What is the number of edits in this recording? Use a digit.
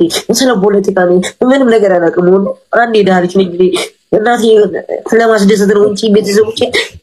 0